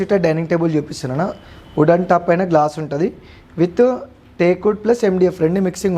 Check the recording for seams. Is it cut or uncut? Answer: uncut